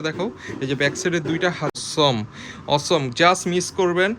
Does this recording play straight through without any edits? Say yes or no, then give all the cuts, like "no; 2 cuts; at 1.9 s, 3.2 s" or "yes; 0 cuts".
no; 1 cut; at 1.7 s